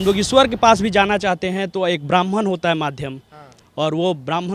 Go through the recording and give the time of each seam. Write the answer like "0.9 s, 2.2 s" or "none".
none